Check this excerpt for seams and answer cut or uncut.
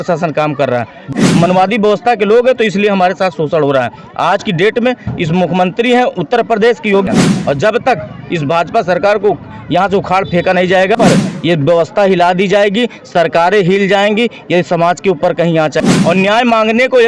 cut